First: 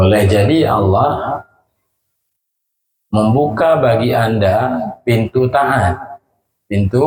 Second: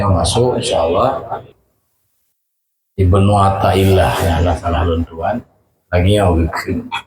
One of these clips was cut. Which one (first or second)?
second